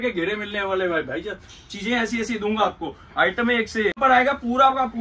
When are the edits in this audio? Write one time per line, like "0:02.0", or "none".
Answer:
0:04.0

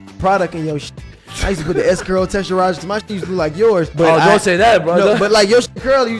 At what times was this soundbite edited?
0:03.9

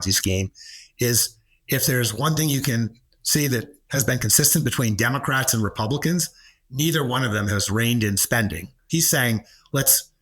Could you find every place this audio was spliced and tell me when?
0:08.8

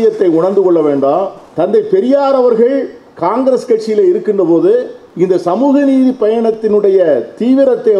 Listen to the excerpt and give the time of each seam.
0:01.4
0:05.0

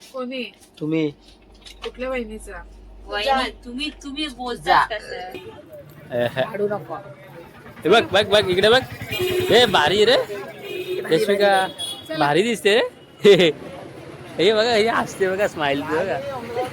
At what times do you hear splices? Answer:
0:05.5

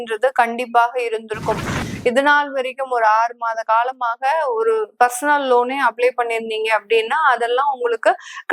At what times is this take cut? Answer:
0:01.8

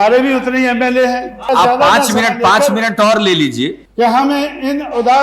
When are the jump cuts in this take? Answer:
0:01.4
0:03.8

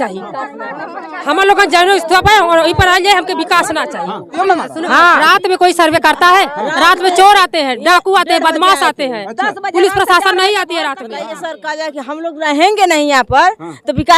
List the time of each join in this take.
0:04.3
0:11.5

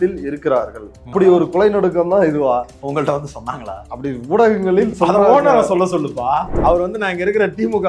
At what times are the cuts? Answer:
0:01.1
0:03.9
0:06.5

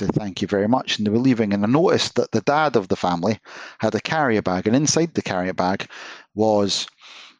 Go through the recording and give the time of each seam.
none

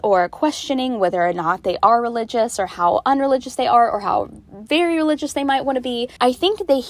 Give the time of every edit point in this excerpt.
none

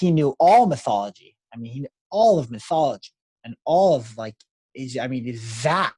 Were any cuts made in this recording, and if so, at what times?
none

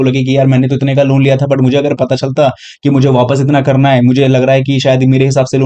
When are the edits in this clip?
none

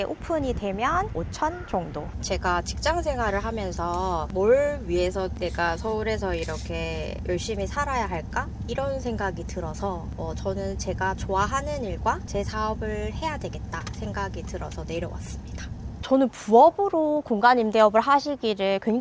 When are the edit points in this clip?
0:02.1
0:16.1

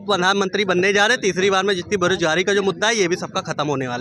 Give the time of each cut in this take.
none

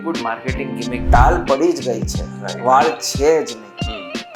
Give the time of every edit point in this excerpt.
0:01.0

